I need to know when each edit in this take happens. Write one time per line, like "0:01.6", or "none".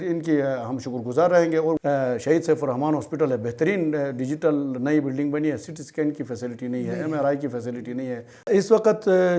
0:01.8
0:08.5